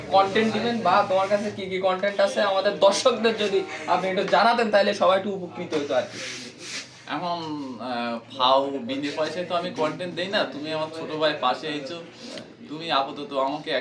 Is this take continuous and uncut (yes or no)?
yes